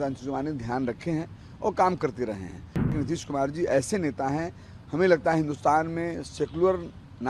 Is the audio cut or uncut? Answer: cut